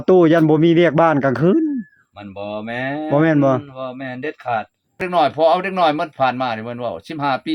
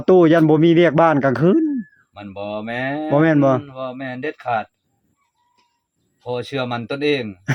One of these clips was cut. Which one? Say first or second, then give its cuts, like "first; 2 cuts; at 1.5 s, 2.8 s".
first; 1 cut; at 5.1 s